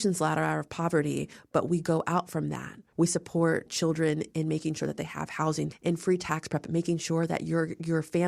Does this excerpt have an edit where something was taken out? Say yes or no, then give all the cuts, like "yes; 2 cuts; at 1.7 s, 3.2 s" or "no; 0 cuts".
yes; 2 cuts; at 2.8 s, 5.7 s